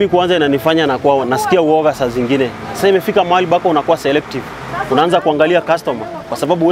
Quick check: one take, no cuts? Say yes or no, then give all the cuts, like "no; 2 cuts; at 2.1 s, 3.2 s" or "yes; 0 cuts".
yes; 0 cuts